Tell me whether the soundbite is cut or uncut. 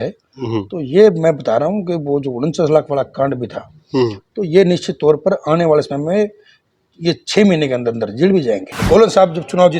cut